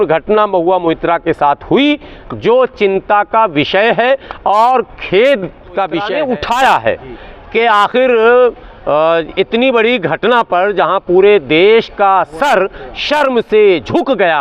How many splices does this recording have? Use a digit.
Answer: 1